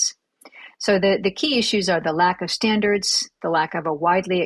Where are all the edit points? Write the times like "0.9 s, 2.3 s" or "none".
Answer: none